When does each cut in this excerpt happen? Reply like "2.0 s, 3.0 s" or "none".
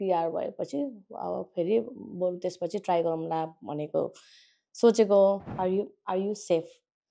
5.5 s